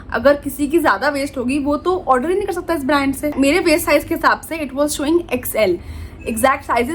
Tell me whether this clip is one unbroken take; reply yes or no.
no